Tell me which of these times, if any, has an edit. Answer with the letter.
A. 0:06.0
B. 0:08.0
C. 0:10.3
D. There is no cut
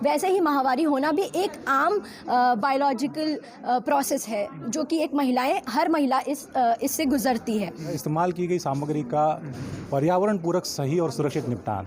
B